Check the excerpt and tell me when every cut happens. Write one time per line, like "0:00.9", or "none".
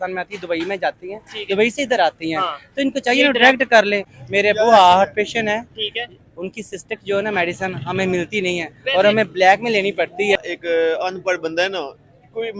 0:04.1
0:10.4